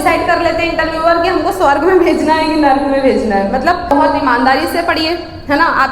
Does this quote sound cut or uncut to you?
cut